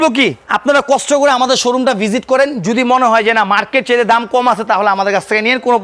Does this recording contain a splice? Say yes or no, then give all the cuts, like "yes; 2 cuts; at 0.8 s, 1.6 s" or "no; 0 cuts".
no; 0 cuts